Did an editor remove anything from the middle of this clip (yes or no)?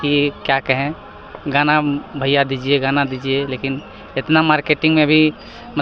no